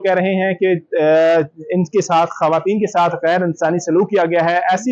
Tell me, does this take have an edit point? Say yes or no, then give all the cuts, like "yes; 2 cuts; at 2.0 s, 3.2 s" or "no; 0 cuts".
no; 0 cuts